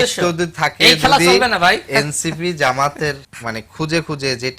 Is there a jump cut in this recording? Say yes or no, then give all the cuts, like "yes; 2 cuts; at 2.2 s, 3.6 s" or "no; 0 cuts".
yes; 1 cut; at 3.3 s